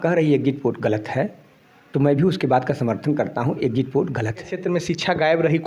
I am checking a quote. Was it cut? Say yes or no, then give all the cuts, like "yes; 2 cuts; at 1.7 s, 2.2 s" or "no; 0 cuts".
yes; 1 cut; at 4.6 s